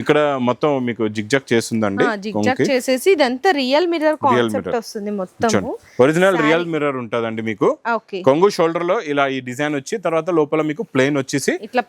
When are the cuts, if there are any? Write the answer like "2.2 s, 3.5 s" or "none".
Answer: none